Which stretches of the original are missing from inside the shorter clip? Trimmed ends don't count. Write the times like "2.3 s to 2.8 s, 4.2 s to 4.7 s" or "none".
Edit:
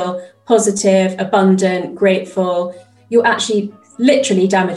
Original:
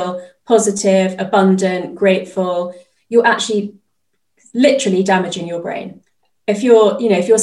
3.8 s to 4.4 s